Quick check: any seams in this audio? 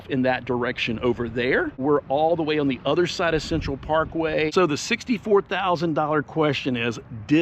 yes; 2 cuts; at 1.8 s, 4.5 s

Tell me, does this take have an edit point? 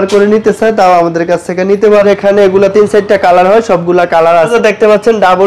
yes; 2 cuts; at 2.1 s, 4.5 s

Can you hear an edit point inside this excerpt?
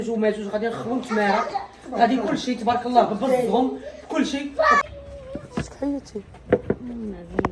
yes; 1 cut; at 4.8 s

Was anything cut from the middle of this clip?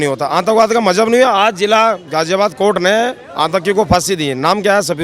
no; 0 cuts

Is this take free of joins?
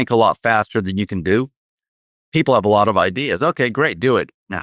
yes; 0 cuts

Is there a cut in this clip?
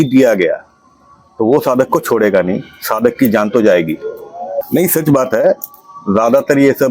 yes; 1 cut; at 4.6 s

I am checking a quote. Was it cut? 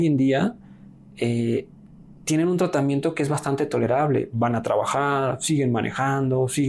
no; 0 cuts

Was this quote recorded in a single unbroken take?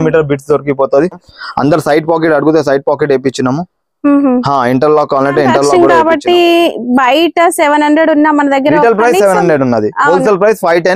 no; 2 cuts; at 1.2 s, 5.7 s

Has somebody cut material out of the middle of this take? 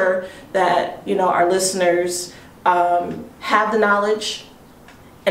no; 0 cuts

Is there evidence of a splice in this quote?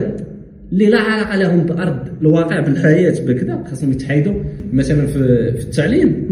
yes; 1 cut; at 4.6 s

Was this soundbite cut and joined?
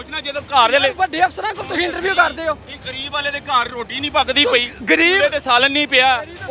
no; 0 cuts

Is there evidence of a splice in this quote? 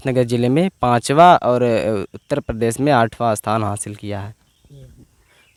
no; 0 cuts

